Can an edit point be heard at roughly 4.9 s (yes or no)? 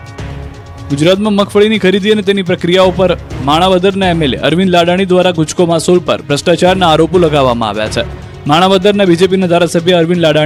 no